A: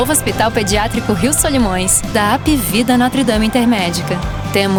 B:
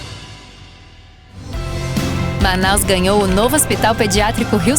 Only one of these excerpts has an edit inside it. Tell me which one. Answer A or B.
B